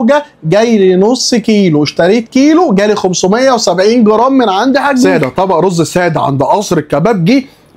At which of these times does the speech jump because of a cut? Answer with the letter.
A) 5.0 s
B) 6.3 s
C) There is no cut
A